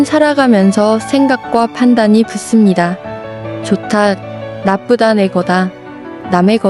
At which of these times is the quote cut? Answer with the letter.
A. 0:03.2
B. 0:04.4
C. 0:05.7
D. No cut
D